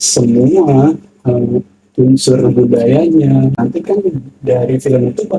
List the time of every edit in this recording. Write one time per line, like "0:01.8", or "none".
0:03.6